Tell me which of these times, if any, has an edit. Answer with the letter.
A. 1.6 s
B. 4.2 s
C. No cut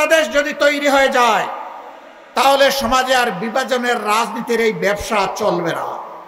C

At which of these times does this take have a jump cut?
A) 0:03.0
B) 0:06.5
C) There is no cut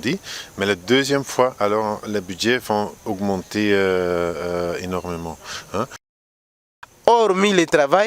B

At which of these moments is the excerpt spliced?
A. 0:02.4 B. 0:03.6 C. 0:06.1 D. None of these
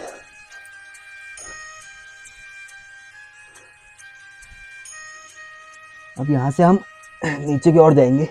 D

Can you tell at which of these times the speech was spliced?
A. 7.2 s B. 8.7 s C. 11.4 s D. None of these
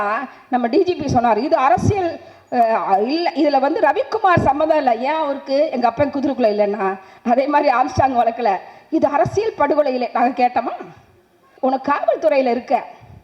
C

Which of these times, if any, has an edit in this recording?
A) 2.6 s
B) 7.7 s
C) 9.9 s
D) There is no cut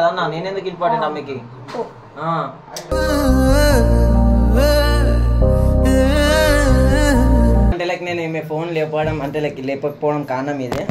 B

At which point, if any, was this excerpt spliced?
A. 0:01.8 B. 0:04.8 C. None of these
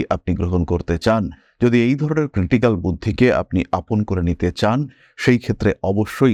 C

